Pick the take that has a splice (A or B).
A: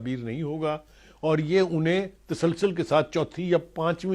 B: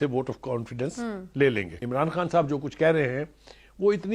B